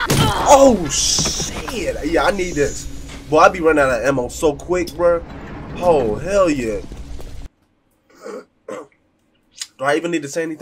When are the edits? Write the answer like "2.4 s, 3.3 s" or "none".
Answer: none